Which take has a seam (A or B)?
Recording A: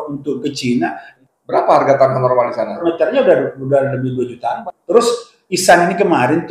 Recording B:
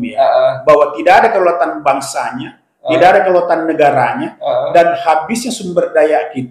A